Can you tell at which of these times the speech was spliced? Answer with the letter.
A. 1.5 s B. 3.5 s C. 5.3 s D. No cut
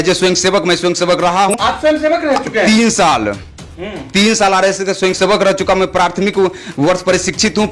A